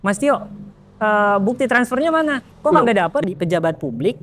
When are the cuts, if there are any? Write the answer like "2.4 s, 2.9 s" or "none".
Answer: 2.5 s, 3.2 s